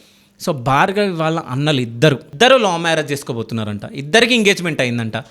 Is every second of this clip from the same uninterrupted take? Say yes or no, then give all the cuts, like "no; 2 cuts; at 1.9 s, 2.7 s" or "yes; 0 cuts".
no; 1 cut; at 2.3 s